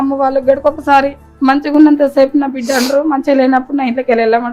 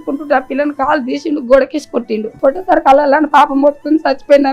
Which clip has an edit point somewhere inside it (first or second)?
second